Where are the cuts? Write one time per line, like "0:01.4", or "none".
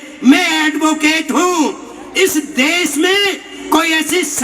0:03.5